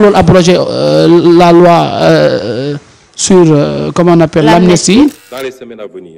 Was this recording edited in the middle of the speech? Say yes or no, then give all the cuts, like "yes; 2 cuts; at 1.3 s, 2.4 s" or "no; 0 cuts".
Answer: yes; 1 cut; at 5.2 s